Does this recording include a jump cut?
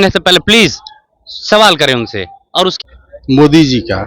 yes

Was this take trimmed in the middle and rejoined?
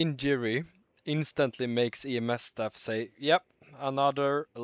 no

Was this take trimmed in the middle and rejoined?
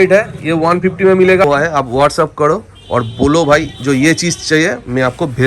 yes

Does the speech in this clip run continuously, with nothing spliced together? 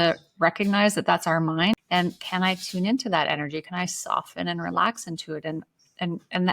no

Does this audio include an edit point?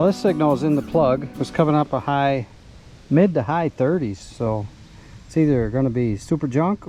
no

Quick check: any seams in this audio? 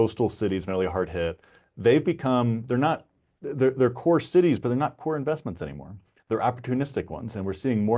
no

